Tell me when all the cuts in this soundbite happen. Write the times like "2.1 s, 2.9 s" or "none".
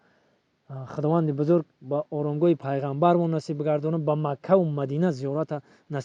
none